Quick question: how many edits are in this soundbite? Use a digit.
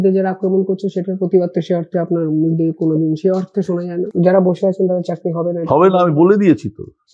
1